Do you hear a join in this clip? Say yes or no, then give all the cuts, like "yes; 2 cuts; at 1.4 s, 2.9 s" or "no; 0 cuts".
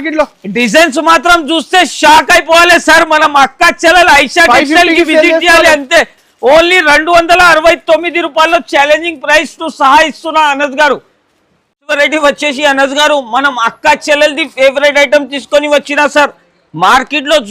no; 0 cuts